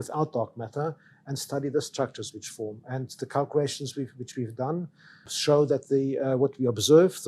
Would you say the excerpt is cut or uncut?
cut